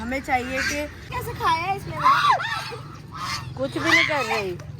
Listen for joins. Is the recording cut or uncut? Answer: cut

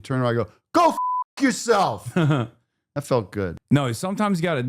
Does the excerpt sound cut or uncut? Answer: cut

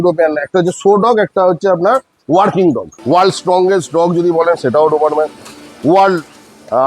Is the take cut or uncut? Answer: cut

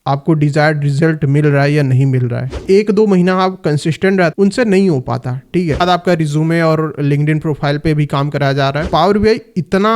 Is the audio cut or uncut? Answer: cut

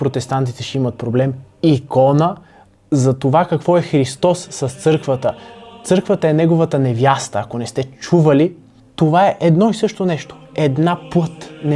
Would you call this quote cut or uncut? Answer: uncut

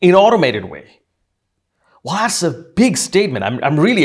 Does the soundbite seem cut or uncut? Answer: uncut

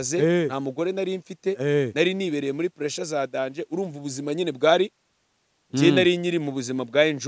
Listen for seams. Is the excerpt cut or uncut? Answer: uncut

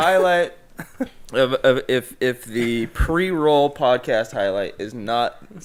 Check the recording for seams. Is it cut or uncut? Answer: uncut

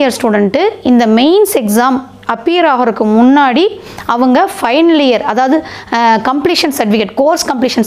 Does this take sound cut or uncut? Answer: uncut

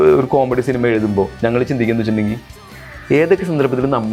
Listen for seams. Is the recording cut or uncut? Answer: uncut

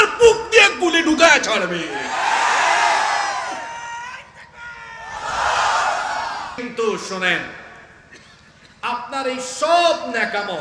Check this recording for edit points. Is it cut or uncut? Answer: cut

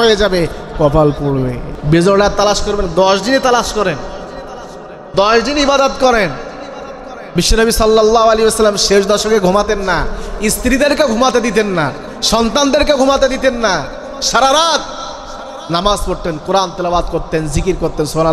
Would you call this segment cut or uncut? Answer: cut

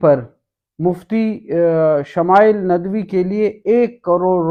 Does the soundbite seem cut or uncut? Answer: uncut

